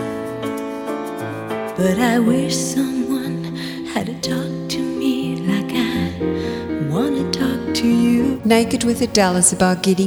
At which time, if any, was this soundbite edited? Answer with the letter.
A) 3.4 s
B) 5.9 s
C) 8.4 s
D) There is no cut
C